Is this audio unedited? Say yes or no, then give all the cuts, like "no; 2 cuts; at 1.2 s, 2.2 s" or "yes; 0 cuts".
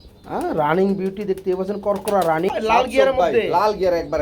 no; 1 cut; at 2.5 s